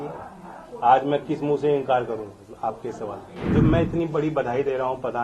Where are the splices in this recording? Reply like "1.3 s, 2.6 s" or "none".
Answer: 3.5 s